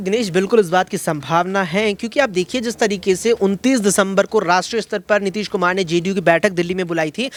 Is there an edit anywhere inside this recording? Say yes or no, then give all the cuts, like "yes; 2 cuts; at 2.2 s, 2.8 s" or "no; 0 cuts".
no; 0 cuts